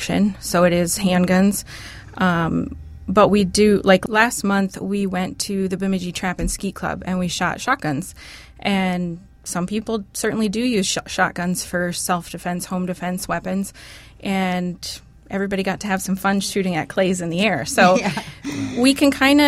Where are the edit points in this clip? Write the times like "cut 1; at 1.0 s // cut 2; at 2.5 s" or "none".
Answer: cut 1; at 4.0 s